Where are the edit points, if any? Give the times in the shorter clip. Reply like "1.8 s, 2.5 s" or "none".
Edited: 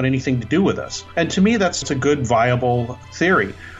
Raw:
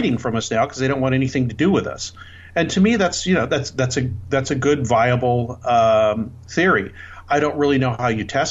0.9 s, 1.8 s, 3.0 s